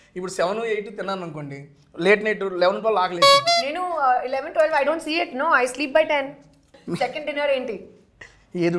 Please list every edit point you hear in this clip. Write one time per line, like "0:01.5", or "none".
0:06.8

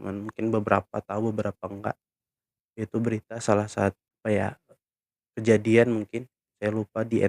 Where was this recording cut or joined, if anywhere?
0:04.0

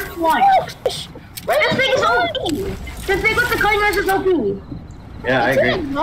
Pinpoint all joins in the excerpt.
0:00.9

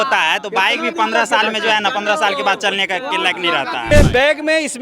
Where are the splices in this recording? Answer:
0:03.9

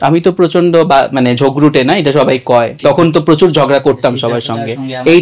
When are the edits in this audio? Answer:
0:02.7

